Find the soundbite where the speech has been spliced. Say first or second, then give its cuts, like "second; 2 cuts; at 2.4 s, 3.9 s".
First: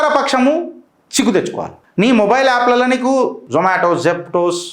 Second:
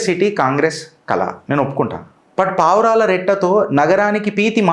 first; 2 cuts; at 1.8 s, 3.4 s